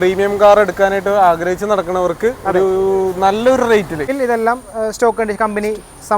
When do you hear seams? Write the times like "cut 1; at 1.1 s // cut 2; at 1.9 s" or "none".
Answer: cut 1; at 4.0 s